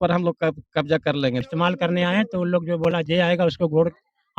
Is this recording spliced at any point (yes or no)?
yes